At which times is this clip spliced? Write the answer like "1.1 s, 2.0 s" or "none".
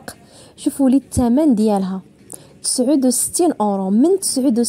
none